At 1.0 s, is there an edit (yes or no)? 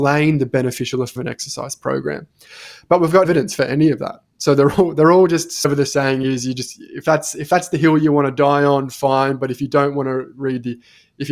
no